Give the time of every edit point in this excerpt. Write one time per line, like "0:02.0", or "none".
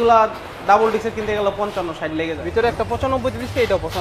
0:02.4